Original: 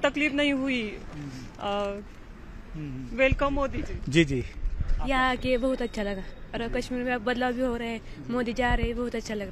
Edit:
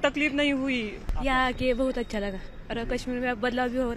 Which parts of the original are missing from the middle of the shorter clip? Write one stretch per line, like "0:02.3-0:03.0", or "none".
0:01.0-0:04.9